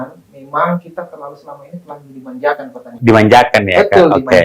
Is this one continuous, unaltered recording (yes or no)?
yes